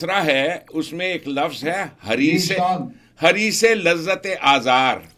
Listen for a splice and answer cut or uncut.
uncut